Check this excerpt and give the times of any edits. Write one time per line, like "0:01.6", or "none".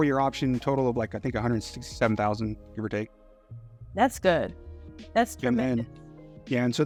none

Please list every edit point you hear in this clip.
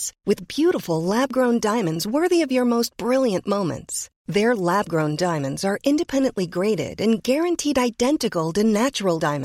none

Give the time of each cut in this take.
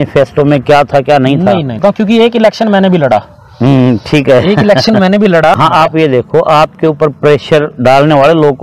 0:01.8
0:05.5

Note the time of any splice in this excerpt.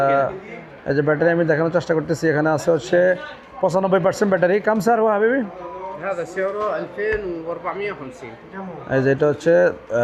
none

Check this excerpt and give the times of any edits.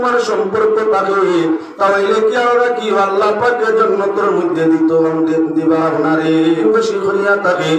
0:06.7

